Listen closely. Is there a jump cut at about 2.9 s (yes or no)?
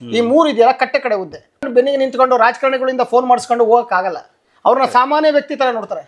no